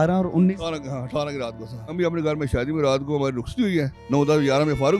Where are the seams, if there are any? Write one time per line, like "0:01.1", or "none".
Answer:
0:01.9
0:04.0